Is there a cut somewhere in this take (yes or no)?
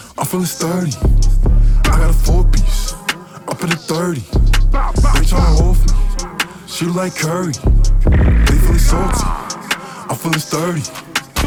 no